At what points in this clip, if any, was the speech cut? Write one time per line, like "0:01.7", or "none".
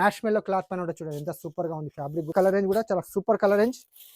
0:02.3